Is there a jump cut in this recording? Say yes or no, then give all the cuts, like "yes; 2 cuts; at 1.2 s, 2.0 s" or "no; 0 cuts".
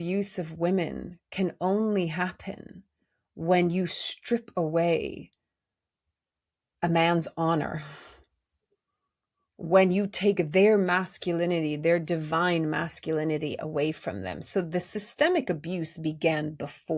no; 0 cuts